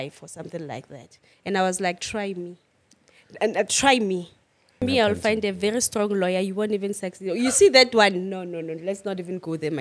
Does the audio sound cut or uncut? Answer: cut